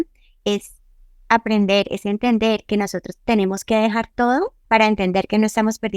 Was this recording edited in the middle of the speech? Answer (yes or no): yes